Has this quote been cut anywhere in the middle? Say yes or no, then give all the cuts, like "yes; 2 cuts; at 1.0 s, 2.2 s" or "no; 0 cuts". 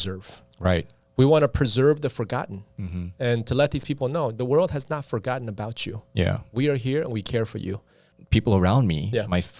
yes; 1 cut; at 8.1 s